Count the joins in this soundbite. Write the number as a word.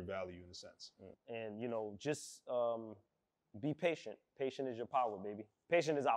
one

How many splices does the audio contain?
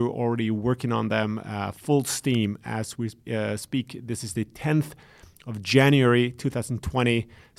zero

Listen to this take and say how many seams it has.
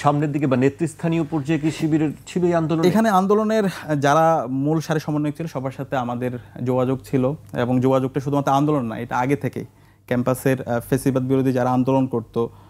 zero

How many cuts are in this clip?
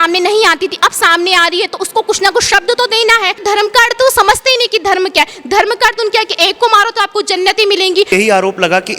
two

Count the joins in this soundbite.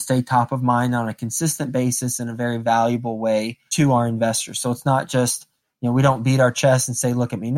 one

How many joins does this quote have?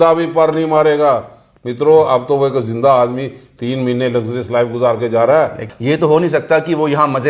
one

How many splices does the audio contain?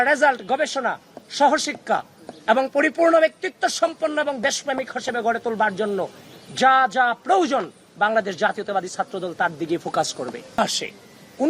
one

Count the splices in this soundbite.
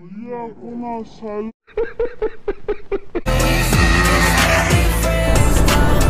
one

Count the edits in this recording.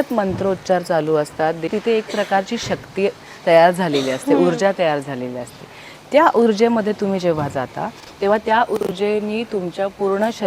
one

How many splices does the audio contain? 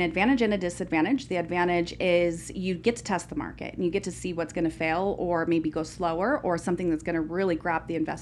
zero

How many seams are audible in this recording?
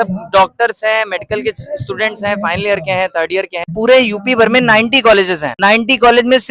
two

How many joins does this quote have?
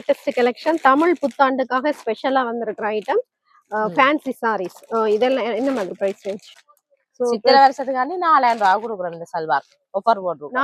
one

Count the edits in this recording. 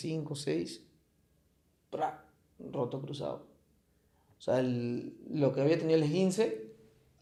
zero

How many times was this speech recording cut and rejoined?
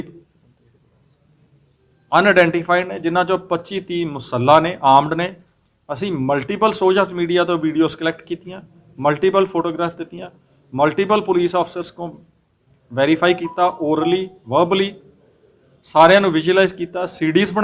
zero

